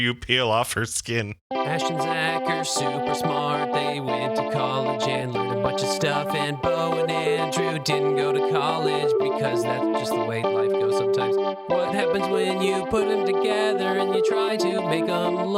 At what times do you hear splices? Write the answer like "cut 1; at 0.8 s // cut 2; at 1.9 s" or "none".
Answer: cut 1; at 1.4 s

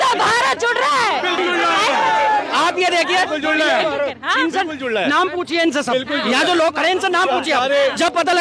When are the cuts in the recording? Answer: cut 1; at 1.4 s

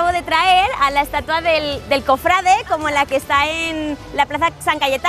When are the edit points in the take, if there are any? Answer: none

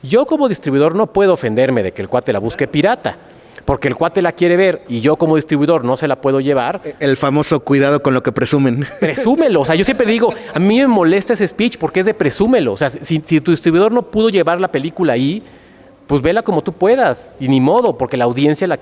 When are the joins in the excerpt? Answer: none

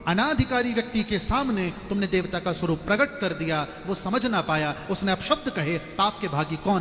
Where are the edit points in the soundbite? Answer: none

